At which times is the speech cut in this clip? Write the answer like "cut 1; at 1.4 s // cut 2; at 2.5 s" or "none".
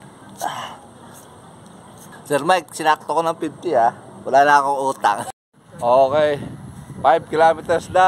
cut 1; at 2.0 s // cut 2; at 5.2 s

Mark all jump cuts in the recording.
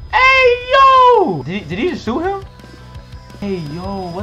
cut 1; at 1.4 s // cut 2; at 3.4 s

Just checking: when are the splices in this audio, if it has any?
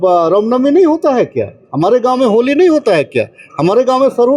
none

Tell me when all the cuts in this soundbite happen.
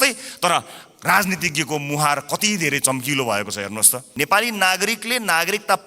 cut 1; at 4.0 s

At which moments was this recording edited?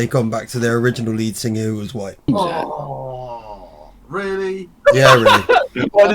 cut 1; at 2.3 s

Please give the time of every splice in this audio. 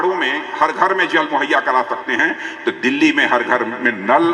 none

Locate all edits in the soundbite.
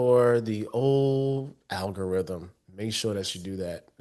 none

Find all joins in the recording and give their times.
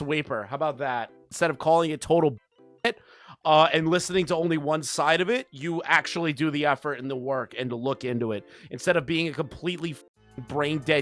cut 1; at 1.3 s

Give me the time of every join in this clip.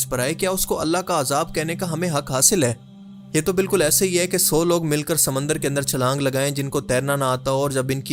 none

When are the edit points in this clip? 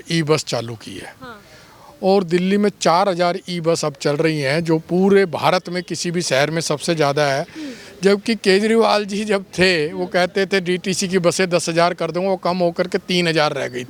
none

